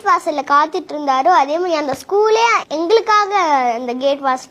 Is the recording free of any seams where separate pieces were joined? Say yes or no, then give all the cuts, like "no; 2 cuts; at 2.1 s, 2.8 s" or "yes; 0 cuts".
yes; 0 cuts